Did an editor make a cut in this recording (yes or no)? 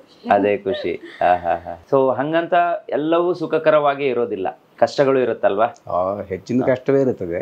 no